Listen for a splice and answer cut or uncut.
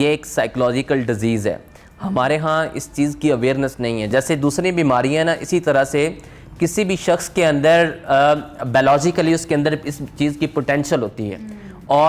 uncut